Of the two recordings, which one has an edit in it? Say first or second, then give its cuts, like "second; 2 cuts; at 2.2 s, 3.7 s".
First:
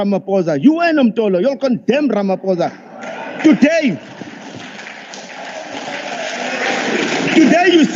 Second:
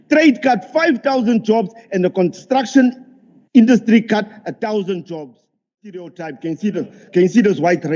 second; 1 cut; at 6.0 s